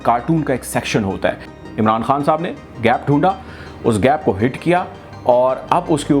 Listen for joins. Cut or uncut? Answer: cut